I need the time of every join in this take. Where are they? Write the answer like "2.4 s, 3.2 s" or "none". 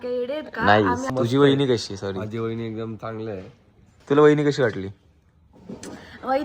1.1 s, 3.9 s

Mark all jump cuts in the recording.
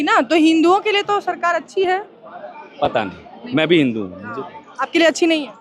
none

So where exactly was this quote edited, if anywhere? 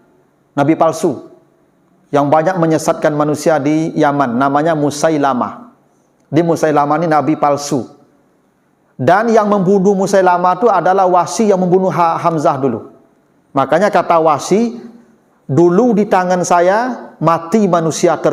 none

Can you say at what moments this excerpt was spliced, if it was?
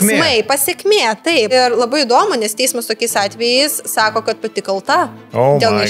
1.5 s

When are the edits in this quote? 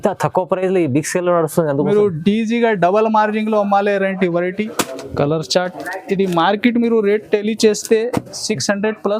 4.8 s

